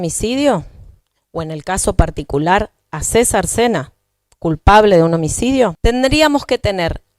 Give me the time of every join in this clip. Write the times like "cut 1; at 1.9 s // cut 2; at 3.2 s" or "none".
cut 1; at 5.8 s